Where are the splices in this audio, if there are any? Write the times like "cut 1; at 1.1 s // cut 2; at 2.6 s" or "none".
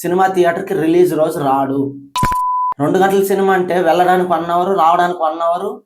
cut 1; at 2.5 s